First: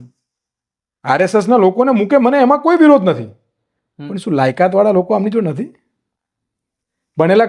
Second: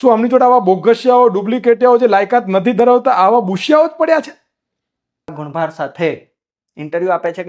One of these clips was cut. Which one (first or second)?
second